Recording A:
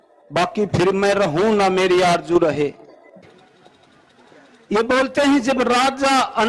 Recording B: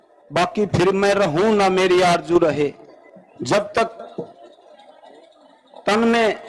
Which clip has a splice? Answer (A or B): A